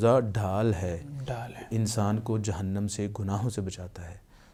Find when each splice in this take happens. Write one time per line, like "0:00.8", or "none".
none

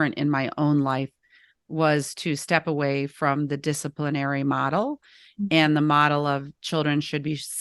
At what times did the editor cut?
none

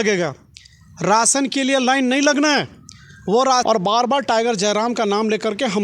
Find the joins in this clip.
0:03.6

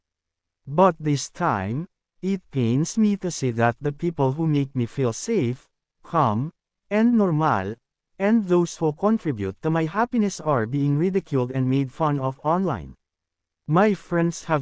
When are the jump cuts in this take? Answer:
0:13.5

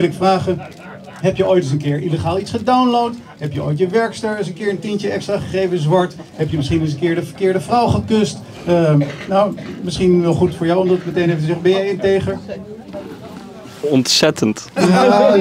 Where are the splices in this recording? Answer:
none

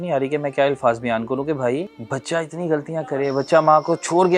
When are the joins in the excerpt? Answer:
0:02.0

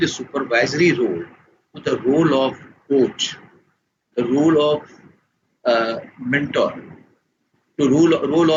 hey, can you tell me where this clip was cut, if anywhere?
none

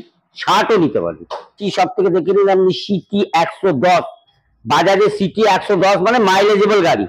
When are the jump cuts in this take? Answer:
0:01.6

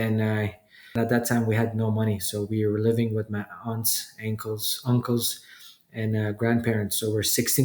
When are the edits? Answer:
0:00.9

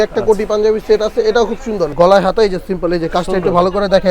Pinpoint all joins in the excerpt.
0:01.9

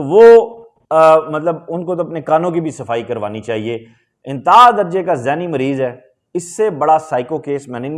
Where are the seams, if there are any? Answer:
none

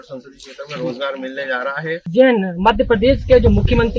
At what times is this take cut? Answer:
0:02.1

